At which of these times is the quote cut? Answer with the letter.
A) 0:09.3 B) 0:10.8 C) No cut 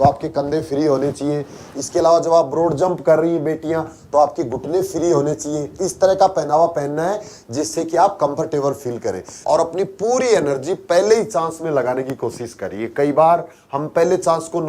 A